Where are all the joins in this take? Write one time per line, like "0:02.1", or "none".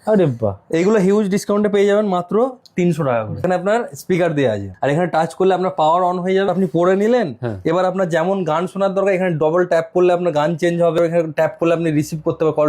0:03.4
0:04.7
0:06.5
0:11.0